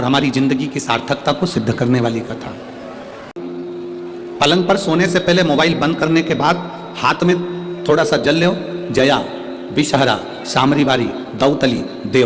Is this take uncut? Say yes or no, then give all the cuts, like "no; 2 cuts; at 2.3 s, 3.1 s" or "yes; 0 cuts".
no; 1 cut; at 3.3 s